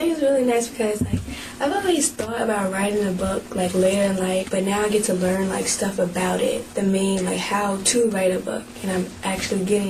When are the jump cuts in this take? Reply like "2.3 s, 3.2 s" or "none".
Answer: none